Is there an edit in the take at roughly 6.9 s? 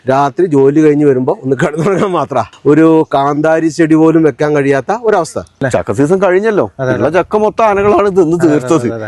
no; 2 cuts; at 2.5 s, 5.6 s

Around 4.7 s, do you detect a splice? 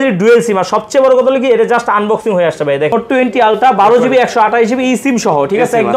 no; 1 cut; at 2.9 s

